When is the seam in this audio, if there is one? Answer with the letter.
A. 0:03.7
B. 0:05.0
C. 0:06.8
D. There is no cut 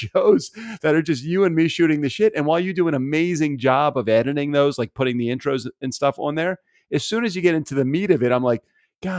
D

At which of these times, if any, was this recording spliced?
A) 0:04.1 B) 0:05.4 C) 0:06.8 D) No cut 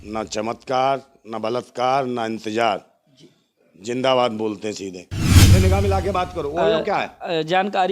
B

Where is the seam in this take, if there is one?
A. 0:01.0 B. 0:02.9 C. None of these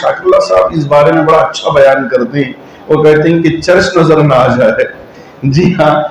C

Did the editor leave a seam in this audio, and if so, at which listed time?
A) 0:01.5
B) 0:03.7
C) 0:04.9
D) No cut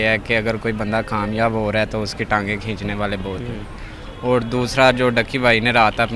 D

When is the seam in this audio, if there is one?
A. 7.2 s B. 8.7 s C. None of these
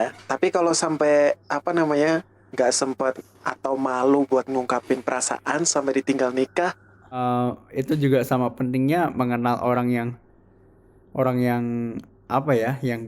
A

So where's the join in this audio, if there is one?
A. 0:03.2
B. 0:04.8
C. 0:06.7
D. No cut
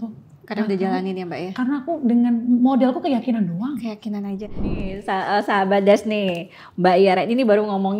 B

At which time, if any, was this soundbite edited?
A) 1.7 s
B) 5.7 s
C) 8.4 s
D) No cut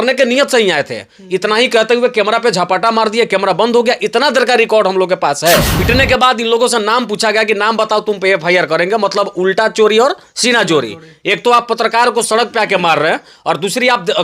B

